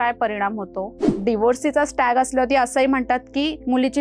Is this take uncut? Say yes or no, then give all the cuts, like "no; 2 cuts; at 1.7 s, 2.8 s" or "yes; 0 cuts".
no; 1 cut; at 1.2 s